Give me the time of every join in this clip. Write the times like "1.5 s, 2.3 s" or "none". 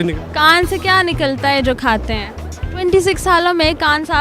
2.6 s